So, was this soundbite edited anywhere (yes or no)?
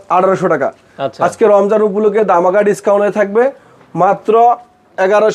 no